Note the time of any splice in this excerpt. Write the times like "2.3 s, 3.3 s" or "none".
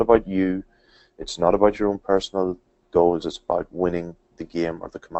none